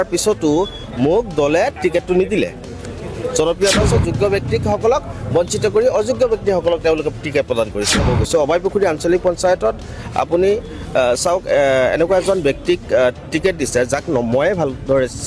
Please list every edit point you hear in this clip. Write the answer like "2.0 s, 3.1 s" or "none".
3.9 s, 8.1 s